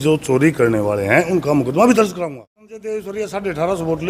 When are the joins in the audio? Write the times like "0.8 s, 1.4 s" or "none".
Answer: 2.2 s